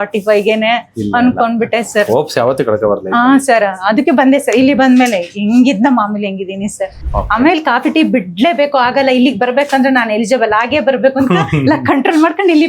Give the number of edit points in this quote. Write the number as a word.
one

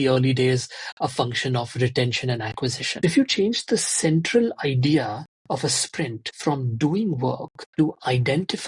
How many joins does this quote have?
three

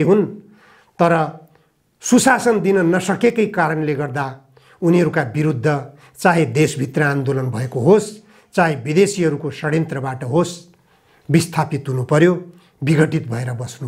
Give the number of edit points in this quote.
zero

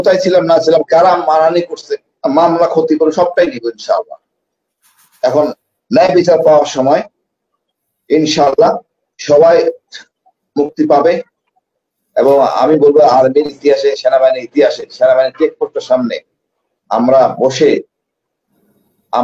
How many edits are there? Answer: zero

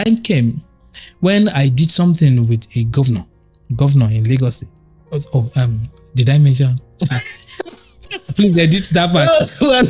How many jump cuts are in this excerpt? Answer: zero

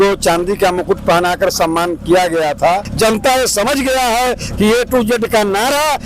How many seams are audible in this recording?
one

